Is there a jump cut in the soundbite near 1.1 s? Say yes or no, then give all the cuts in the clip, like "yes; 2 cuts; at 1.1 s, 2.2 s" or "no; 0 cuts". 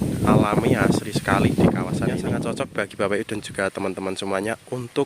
no; 1 cut; at 2.5 s